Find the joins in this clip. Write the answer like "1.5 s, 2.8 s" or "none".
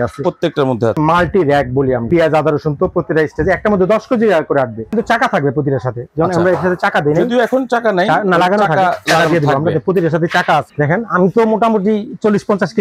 1.0 s, 2.1 s, 4.9 s, 10.7 s